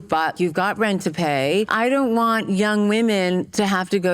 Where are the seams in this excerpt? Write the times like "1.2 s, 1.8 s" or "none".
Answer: 1.7 s